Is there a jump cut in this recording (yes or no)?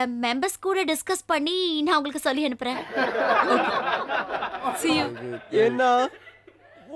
yes